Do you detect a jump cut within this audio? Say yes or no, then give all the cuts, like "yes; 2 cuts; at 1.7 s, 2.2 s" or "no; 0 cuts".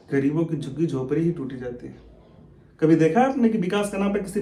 no; 0 cuts